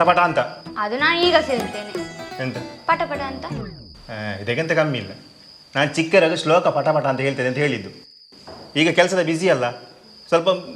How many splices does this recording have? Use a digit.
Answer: 0